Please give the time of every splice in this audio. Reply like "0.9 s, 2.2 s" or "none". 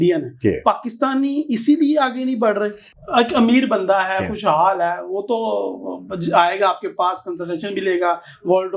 2.8 s